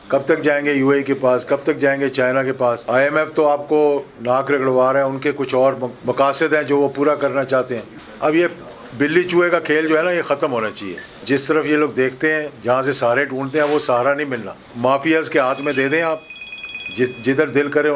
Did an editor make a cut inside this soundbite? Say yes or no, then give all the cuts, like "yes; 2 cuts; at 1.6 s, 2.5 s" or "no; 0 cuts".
yes; 5 cuts; at 2.8 s, 5.9 s, 8.0 s, 11.2 s, 14.6 s